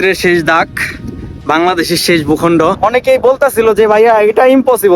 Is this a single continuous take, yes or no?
no